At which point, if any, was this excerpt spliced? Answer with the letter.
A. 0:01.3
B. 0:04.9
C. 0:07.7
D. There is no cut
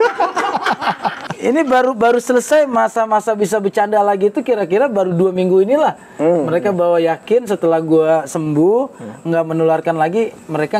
A